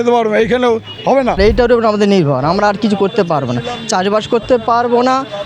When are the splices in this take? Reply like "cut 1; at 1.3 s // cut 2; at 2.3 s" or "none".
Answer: cut 1; at 1.4 s